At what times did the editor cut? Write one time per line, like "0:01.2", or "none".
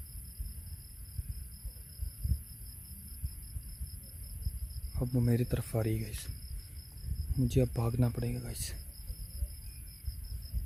none